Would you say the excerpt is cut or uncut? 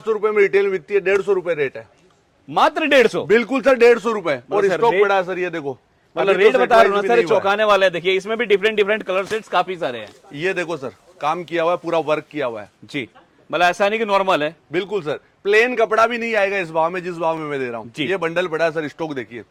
uncut